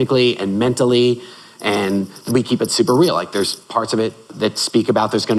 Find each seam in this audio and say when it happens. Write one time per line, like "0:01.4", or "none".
0:02.3
0:04.3

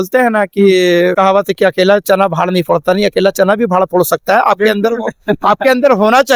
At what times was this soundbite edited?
0:01.1

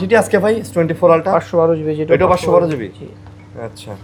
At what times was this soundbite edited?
none

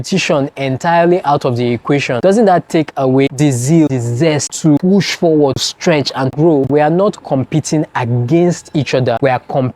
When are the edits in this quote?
0:06.7

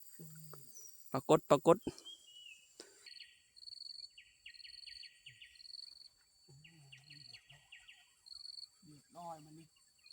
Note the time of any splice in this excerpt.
0:03.1

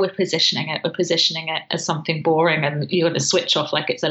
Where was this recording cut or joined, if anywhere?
none

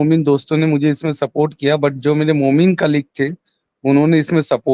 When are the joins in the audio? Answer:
none

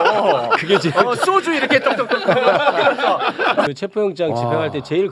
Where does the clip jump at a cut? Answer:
0:03.7

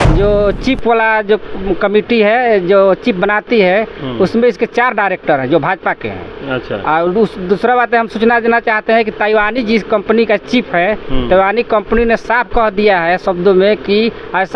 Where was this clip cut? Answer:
none

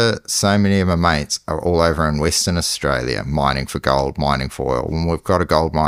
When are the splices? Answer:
none

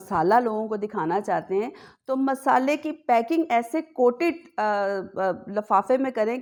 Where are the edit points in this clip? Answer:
none

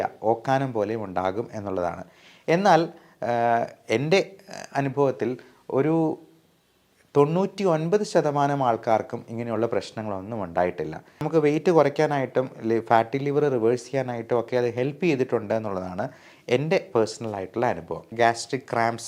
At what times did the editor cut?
0:11.2
0:18.1

